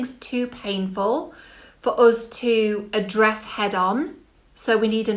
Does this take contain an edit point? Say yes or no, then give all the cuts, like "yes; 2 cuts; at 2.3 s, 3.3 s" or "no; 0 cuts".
no; 0 cuts